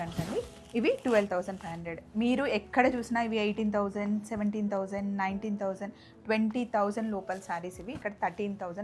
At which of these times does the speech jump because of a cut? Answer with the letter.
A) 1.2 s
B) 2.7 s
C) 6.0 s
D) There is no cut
D